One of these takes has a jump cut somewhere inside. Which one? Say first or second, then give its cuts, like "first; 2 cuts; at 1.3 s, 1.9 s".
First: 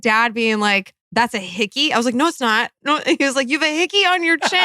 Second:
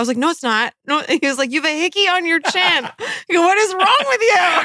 first; 1 cut; at 1.0 s